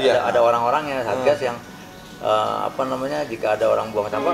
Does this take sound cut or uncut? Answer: uncut